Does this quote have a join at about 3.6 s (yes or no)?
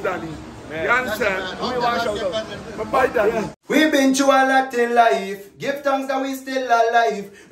yes